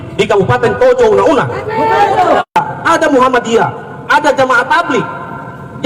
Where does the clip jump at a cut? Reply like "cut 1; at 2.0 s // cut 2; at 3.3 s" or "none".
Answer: cut 1; at 2.5 s